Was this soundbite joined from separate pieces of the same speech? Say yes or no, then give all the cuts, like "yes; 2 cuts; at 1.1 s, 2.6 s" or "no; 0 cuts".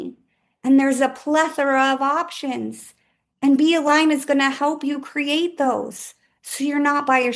no; 0 cuts